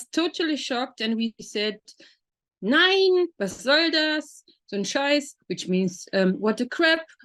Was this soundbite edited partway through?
no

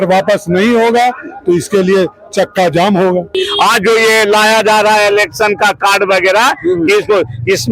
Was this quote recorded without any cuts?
no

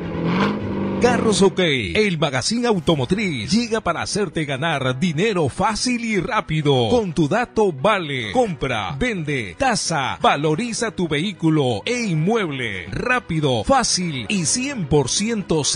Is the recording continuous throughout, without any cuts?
no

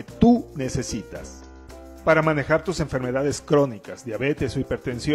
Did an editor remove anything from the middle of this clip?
no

